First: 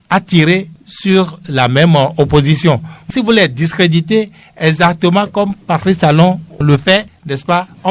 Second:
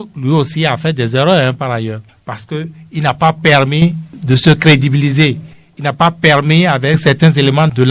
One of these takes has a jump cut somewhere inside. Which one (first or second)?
first